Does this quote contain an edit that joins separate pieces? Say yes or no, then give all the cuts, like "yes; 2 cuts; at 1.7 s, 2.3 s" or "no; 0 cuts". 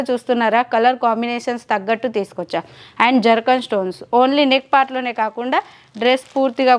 no; 0 cuts